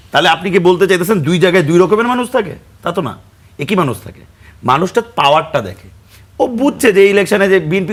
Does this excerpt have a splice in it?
no; 0 cuts

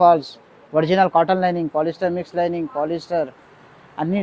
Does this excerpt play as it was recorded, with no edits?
yes; 0 cuts

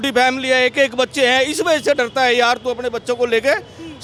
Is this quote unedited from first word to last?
yes; 0 cuts

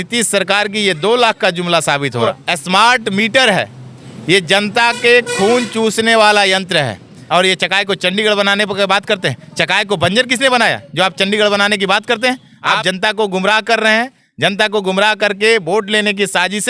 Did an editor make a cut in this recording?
yes; 3 cuts; at 2.4 s, 7.2 s, 12.8 s

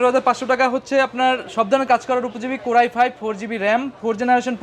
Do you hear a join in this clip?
no; 0 cuts

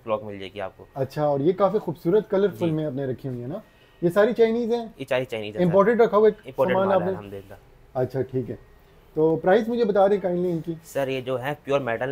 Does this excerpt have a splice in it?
no; 0 cuts

